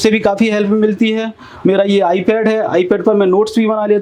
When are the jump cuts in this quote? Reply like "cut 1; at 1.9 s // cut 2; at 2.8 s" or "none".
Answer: none